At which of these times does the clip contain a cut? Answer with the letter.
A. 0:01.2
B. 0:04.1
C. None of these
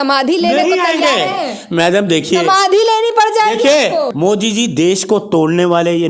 B